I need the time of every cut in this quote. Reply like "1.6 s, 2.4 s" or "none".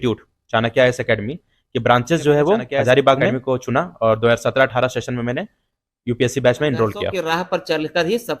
3.3 s, 7.2 s